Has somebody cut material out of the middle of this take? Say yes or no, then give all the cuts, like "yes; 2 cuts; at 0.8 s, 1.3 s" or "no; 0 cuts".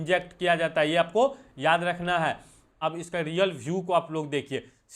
yes; 1 cut; at 2.8 s